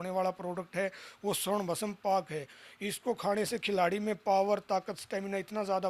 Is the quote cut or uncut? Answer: uncut